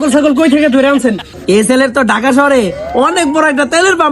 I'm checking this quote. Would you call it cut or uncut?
cut